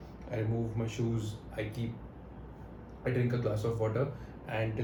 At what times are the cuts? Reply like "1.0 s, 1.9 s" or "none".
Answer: none